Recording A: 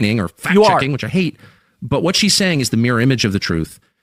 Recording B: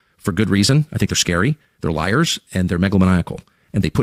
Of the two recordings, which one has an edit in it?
B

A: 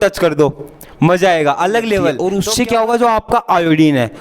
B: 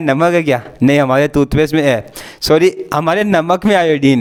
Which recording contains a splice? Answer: A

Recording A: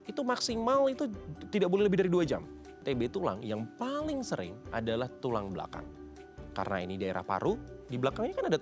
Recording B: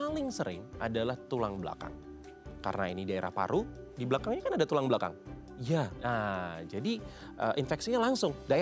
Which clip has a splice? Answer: A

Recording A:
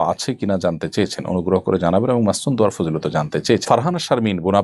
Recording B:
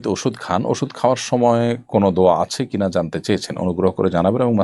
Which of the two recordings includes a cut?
A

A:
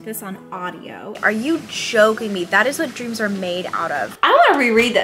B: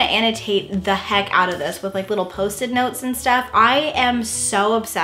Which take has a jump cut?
A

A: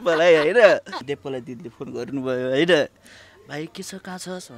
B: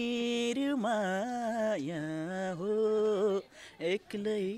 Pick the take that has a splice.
A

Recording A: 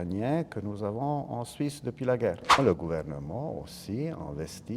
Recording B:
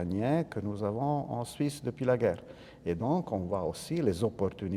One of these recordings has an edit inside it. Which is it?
A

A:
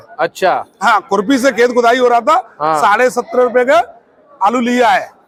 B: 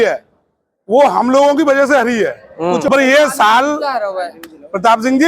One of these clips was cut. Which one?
B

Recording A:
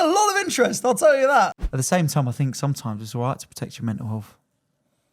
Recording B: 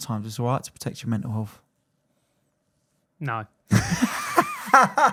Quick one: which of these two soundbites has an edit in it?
A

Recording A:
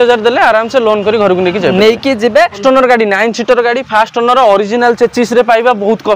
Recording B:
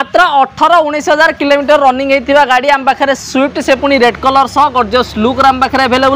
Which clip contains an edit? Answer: A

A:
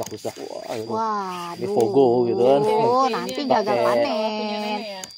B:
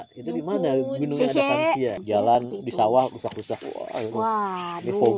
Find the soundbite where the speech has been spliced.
B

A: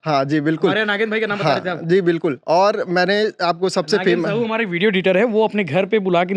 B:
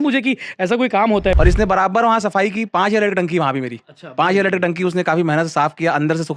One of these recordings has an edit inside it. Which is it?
B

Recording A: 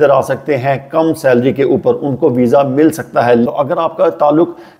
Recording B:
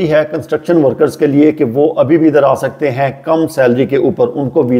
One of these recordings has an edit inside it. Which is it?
A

